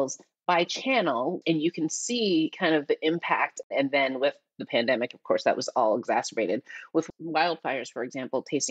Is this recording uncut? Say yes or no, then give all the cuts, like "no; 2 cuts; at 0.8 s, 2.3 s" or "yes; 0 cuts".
no; 2 cuts; at 1.4 s, 3.6 s